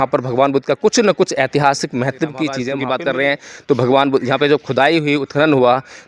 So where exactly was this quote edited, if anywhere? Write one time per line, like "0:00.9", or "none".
0:02.7